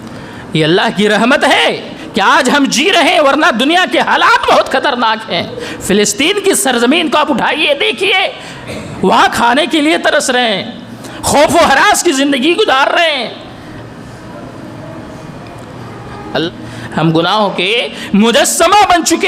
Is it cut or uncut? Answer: cut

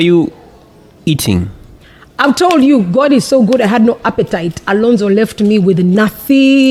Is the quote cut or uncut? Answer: uncut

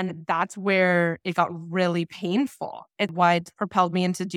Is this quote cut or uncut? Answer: cut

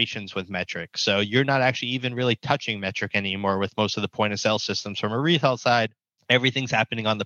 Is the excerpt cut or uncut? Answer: cut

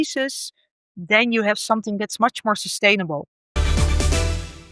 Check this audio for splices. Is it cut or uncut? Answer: cut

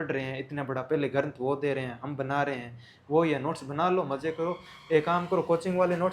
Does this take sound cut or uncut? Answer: uncut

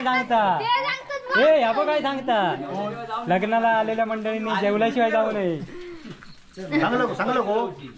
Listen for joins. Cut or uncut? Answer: uncut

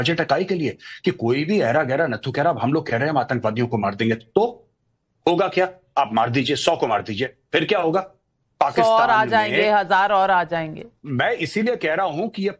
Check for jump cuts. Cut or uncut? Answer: uncut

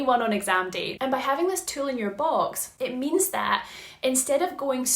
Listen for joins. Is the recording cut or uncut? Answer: cut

